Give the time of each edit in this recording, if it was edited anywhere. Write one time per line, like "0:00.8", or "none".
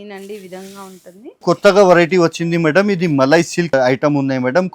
0:01.4